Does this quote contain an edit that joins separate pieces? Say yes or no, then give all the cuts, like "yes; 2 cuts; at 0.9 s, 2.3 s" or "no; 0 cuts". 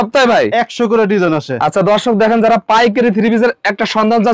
no; 0 cuts